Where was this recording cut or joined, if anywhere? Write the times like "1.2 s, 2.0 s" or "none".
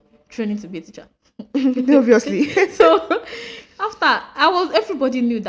none

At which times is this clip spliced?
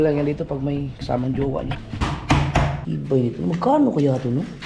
2.1 s, 2.8 s

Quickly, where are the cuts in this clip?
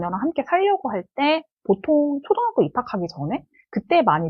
none

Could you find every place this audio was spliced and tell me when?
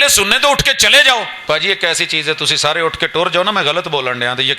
1.4 s

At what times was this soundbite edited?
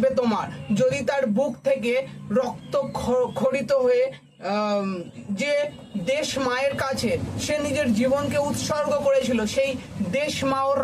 none

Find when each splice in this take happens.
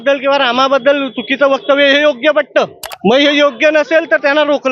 none

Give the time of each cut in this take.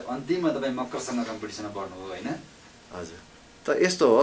none

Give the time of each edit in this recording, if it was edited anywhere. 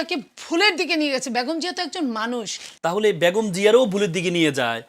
2.6 s

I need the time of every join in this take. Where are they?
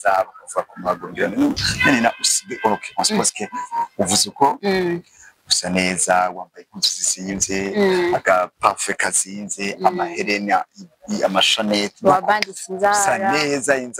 none

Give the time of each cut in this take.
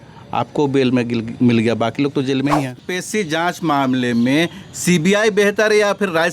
2.8 s

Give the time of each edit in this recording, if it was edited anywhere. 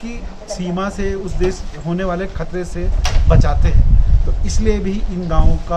none

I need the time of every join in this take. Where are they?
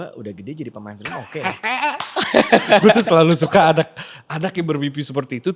none

